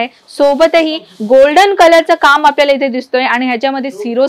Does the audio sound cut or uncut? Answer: uncut